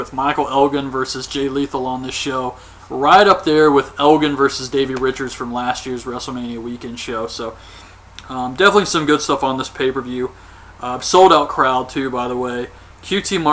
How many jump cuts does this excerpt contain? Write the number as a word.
zero